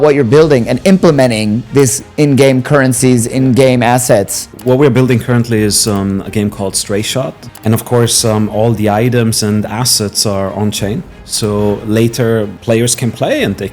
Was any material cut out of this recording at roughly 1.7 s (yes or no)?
no